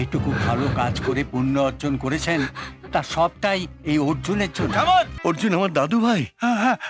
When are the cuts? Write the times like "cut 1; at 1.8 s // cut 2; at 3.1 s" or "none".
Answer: cut 1; at 5.1 s